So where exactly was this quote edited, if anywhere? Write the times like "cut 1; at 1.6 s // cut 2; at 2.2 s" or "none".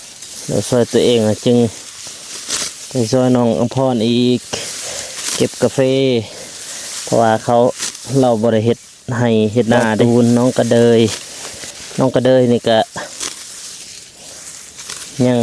cut 1; at 10.0 s

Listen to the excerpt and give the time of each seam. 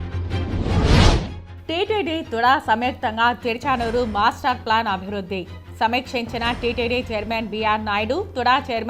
cut 1; at 1.4 s

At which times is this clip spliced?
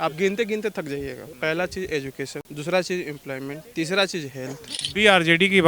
cut 1; at 1.2 s // cut 2; at 2.5 s // cut 3; at 3.6 s // cut 4; at 4.8 s

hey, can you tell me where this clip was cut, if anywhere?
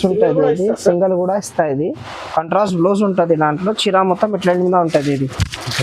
cut 1; at 2.0 s

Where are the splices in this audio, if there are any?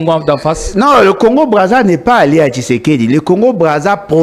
none

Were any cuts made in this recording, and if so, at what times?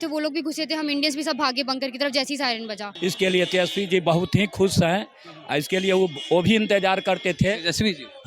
cut 1; at 2.9 s

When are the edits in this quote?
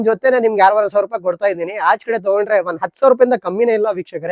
none

